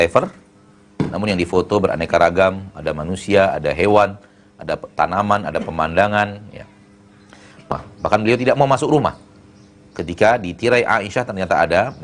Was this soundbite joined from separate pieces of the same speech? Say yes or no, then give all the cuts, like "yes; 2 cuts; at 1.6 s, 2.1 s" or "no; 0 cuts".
yes; 1 cut; at 7.7 s